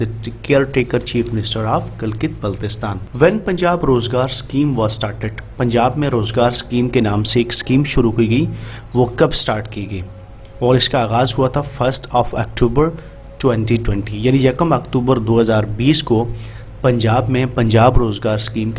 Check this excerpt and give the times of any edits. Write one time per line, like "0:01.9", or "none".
0:03.0

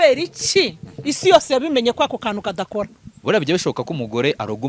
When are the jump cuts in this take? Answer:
none

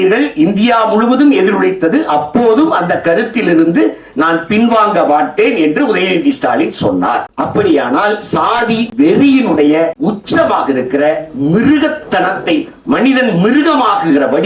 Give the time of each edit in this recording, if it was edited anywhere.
0:07.3
0:08.9
0:10.0

